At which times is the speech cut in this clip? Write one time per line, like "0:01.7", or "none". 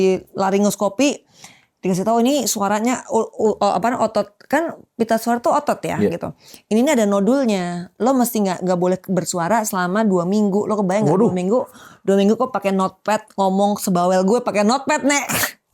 none